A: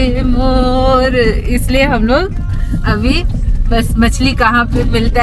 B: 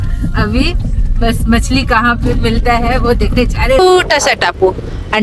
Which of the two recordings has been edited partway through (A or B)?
B